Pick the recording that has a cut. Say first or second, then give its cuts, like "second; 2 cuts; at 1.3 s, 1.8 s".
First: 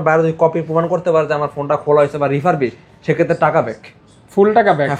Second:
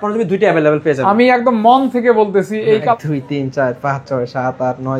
second; 1 cut; at 2.9 s